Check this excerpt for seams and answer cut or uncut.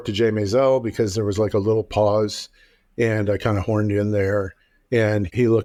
uncut